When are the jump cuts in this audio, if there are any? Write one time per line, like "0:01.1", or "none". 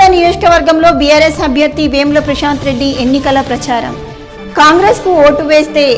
none